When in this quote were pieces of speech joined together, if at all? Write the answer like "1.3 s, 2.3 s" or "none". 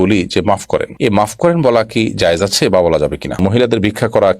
3.4 s